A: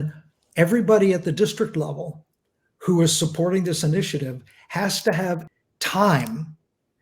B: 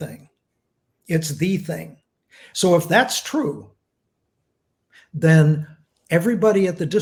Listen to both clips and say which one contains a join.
A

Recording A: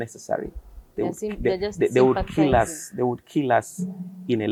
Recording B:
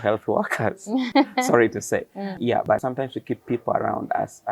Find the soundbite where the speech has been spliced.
B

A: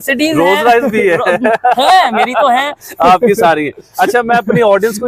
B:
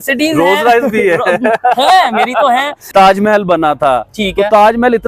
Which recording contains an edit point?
B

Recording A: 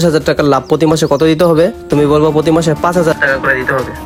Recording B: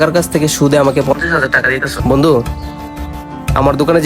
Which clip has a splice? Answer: B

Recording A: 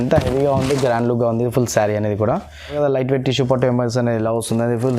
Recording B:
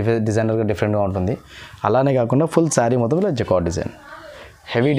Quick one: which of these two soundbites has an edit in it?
A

